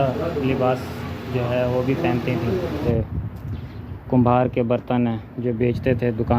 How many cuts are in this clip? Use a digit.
1